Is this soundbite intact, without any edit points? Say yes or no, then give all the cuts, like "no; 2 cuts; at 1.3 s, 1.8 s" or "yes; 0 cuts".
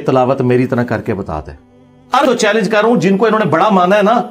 no; 1 cut; at 2.3 s